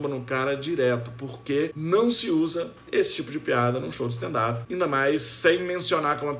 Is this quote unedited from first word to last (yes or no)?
yes